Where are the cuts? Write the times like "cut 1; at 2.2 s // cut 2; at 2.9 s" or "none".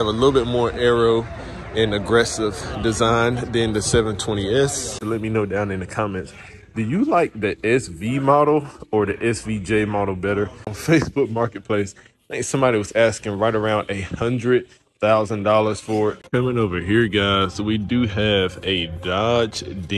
cut 1; at 5.0 s // cut 2; at 10.7 s // cut 3; at 16.2 s